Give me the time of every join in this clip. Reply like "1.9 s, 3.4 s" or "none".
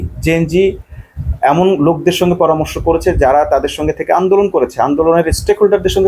none